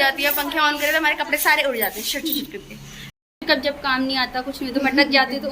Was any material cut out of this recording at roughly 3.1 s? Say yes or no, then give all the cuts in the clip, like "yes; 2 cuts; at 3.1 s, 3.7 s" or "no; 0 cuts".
yes; 1 cut; at 3.1 s